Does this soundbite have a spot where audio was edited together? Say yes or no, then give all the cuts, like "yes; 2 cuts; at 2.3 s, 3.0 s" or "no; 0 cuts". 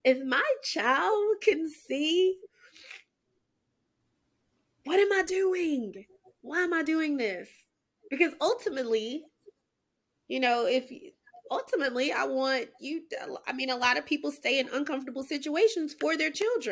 no; 0 cuts